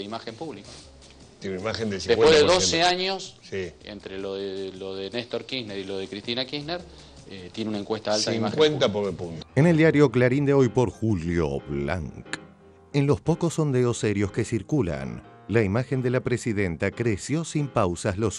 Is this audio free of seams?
no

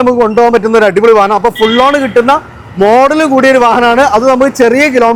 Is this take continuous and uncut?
yes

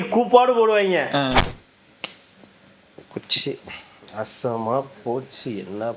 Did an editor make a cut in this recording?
yes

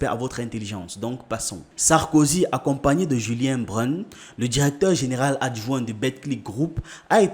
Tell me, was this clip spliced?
yes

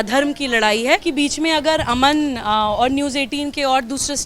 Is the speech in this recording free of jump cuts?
no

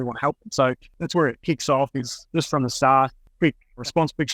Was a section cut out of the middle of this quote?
yes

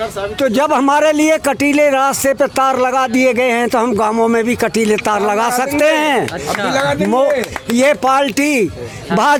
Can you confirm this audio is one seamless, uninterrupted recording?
yes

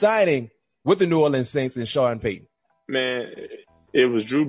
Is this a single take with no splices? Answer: yes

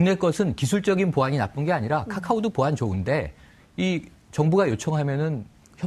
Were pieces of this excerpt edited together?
yes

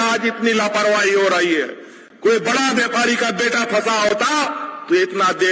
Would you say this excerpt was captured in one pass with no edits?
yes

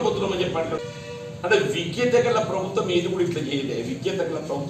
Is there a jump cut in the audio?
yes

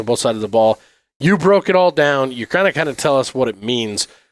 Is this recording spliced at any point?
no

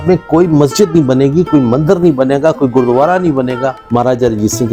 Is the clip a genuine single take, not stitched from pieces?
no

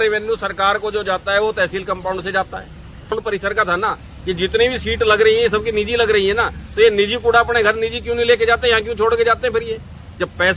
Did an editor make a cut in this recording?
yes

